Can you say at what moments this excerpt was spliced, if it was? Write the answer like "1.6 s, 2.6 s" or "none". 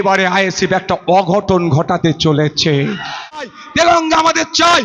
3.5 s